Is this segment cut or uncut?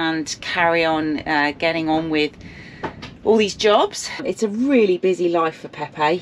cut